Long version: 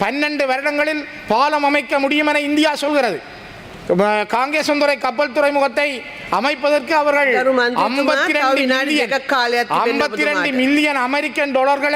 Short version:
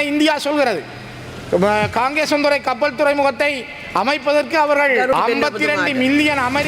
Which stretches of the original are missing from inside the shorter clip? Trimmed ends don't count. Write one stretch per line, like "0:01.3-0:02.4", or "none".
0:07.5-0:09.7